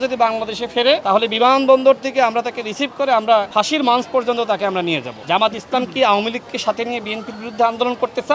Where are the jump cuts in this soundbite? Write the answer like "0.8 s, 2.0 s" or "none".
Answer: 1.0 s, 3.5 s, 5.1 s